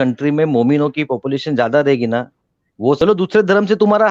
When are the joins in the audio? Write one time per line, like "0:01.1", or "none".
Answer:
0:03.0